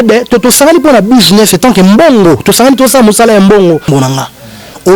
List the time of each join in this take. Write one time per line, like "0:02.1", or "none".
0:03.9